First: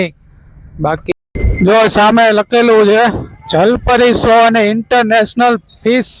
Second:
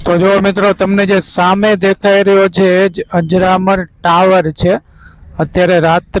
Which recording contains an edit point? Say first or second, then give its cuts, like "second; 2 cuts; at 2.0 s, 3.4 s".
first; 1 cut; at 1.0 s